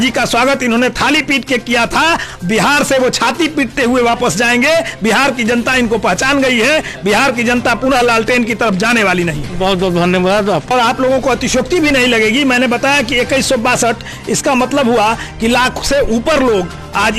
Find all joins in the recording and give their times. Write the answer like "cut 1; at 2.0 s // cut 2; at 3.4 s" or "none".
cut 1; at 10.7 s